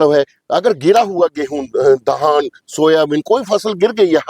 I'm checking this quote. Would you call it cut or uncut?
uncut